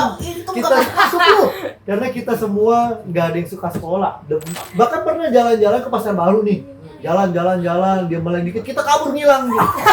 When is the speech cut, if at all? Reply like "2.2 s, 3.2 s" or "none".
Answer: 4.7 s